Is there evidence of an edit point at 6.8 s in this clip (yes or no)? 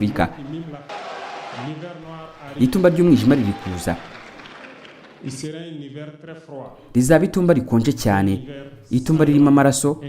yes